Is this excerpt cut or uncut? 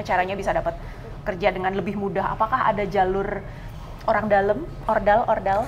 uncut